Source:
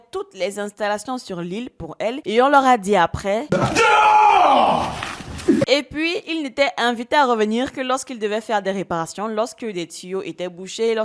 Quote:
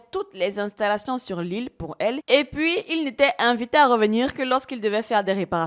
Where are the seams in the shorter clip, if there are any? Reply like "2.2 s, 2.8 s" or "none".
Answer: 2.3 s

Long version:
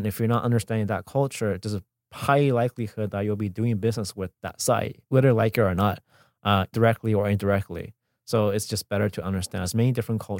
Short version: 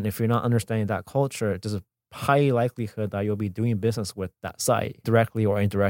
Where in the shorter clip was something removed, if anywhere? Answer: 5.0 s

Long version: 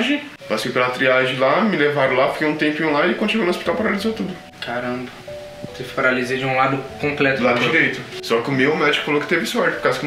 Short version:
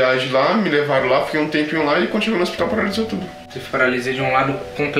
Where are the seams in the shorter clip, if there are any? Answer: 3.5 s

